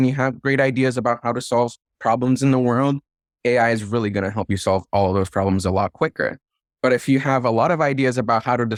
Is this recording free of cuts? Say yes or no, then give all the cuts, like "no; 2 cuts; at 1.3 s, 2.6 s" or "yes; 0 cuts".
yes; 0 cuts